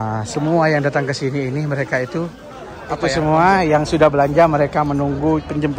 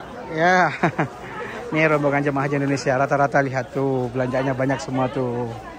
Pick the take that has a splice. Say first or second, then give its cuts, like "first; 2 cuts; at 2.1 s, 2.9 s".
first; 1 cut; at 3.1 s